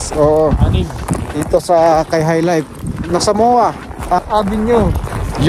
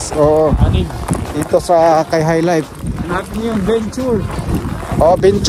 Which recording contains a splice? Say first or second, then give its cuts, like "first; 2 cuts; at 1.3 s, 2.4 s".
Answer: first; 2 cuts; at 3.0 s, 4.2 s